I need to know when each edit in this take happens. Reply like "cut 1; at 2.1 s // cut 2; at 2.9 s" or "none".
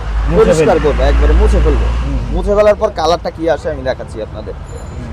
none